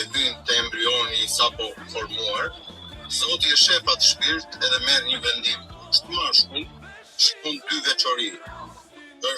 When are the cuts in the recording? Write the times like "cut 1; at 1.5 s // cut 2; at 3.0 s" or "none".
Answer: none